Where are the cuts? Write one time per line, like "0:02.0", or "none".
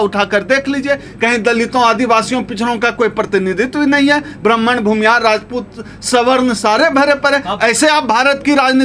none